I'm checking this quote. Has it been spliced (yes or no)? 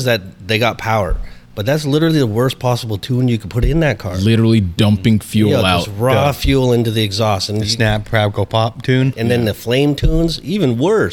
yes